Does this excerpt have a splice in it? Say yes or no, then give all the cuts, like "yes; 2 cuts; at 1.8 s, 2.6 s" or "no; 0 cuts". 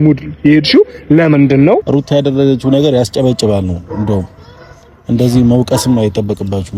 yes; 1 cut; at 1.8 s